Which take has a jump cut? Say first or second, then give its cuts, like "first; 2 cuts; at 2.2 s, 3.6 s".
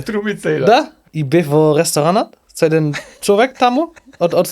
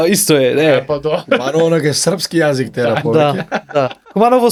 first; 1 cut; at 1.0 s